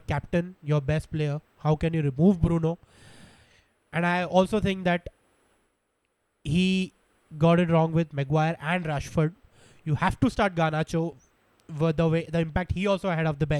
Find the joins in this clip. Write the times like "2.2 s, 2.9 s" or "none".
none